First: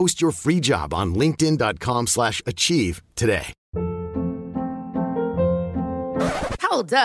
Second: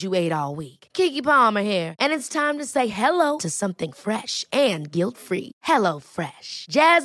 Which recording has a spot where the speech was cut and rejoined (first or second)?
first